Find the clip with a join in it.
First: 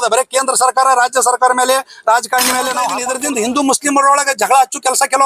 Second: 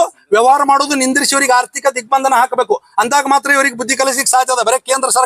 first; 1 cut; at 3.0 s

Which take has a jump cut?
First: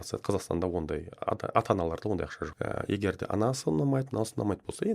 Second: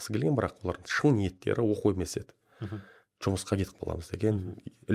first; 1 cut; at 2.4 s

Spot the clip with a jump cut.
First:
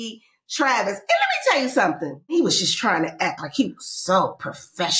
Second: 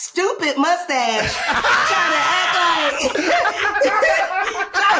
first; 1 cut; at 2.3 s

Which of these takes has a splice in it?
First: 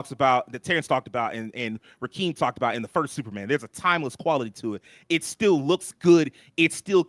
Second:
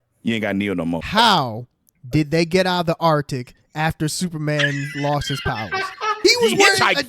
second; 2 cuts; at 1.0 s, 6.2 s

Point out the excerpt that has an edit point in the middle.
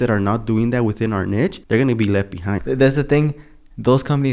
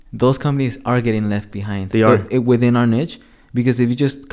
first; 2 cuts; at 1.6 s, 2.6 s

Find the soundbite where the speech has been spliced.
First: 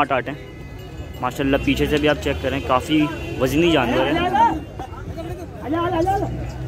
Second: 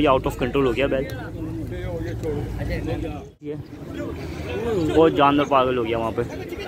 second; 1 cut; at 3.4 s

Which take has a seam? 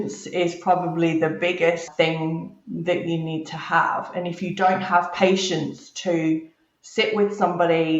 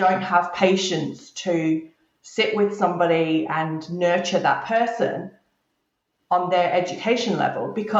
first; 1 cut; at 1.9 s

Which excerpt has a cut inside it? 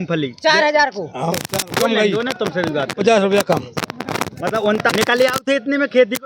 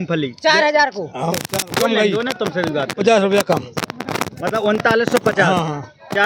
first; 1 cut; at 4.9 s

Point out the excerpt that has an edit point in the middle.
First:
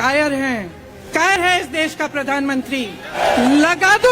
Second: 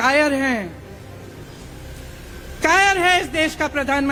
first; 2 cuts; at 1.4 s, 3.1 s

